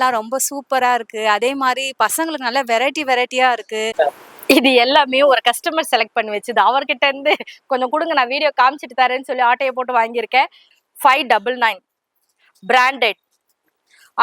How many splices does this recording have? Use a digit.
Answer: 2